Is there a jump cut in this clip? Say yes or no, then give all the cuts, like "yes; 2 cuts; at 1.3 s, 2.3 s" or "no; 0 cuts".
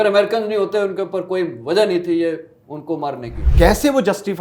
yes; 1 cut; at 3.4 s